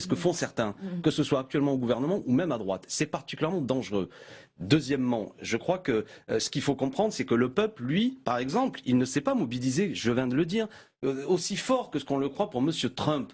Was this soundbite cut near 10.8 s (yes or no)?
no